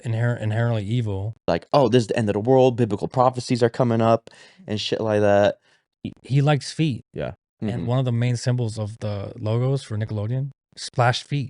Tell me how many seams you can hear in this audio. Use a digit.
2